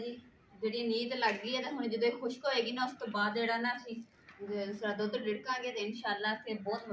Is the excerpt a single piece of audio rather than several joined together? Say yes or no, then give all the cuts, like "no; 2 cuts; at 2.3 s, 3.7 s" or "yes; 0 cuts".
yes; 0 cuts